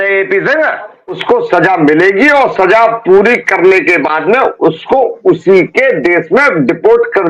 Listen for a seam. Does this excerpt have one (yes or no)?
yes